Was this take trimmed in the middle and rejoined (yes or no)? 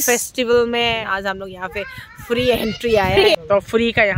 yes